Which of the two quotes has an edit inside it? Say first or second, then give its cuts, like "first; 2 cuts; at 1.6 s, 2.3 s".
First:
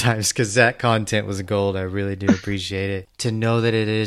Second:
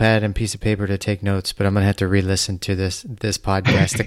first; 1 cut; at 3.1 s